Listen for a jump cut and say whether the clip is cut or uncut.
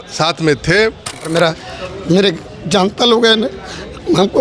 cut